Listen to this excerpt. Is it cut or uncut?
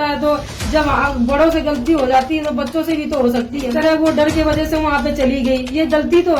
cut